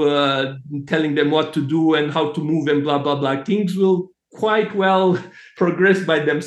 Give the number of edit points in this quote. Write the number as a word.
one